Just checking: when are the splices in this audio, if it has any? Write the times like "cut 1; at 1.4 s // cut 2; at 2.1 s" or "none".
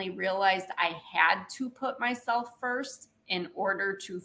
none